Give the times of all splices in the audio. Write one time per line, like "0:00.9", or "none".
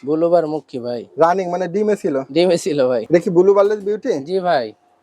0:03.0

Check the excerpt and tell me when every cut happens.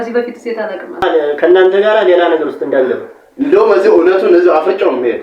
0:01.0

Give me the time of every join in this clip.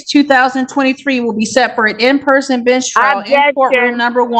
none

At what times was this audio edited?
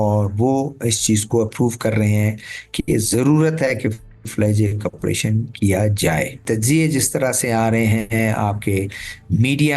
0:06.4

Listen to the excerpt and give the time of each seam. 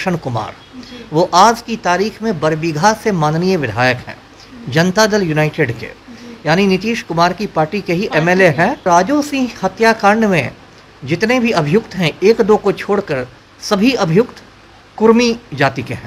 0:08.8

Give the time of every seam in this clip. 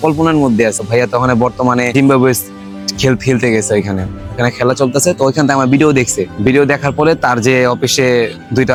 none

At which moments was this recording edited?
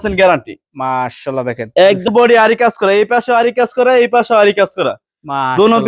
0:02.1

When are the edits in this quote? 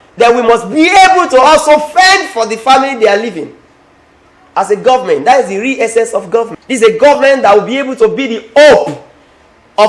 0:06.6

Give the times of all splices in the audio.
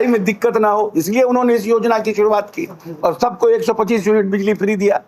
none

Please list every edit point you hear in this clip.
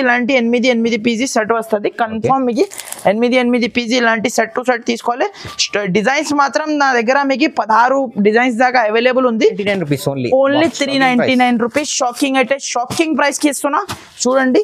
0:09.6

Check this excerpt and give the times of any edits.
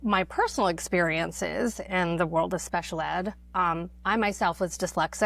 none

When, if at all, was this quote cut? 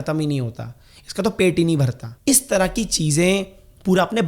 0:02.0

